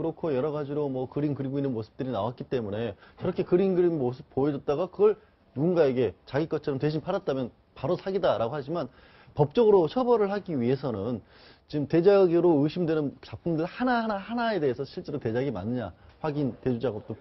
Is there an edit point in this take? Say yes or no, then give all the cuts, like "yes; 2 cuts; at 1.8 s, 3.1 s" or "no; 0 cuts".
no; 0 cuts